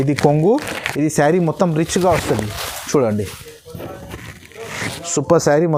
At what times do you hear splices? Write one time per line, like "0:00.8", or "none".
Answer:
none